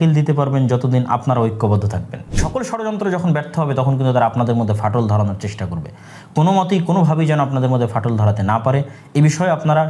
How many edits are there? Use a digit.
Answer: 1